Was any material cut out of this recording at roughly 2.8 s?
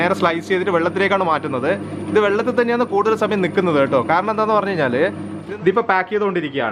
no; 1 cut; at 5.3 s

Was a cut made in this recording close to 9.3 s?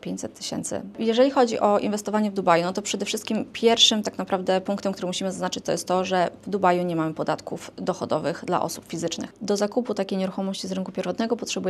yes; 2 cuts; at 1.0 s, 9.3 s

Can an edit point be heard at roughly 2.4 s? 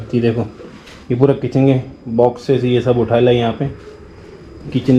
no; 0 cuts

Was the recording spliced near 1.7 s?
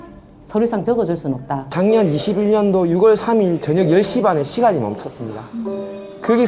yes; 1 cut; at 1.7 s

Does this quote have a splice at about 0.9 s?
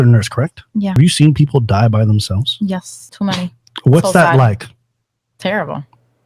yes; 2 cuts; at 0.9 s, 3.0 s

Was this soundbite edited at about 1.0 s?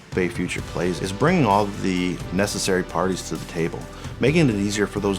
yes; 1 cut; at 1.0 s

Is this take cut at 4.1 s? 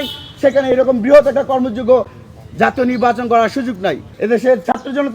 yes; 1 cut; at 4.1 s

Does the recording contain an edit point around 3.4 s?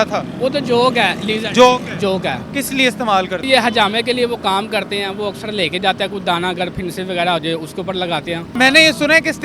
yes; 3 cuts; at 2.4 s, 3.4 s, 8.5 s

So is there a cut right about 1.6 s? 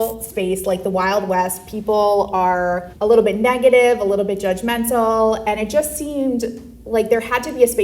no; 1 cut; at 2.9 s

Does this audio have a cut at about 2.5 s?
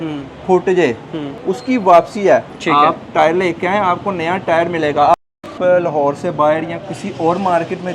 yes; 3 cuts; at 1.3 s, 2.5 s, 5.1 s

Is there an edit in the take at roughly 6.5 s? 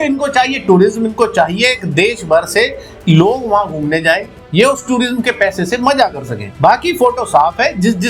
no; 0 cuts

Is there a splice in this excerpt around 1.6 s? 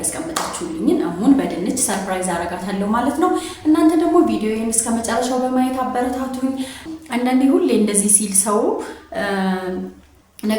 no; 1 cut; at 6.9 s

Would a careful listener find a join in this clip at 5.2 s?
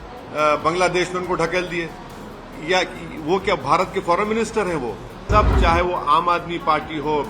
yes; 1 cut; at 5.2 s

